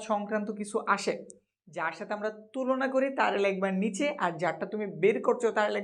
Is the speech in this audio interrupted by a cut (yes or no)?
no